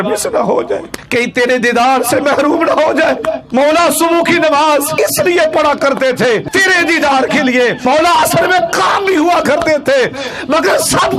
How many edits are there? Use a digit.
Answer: 5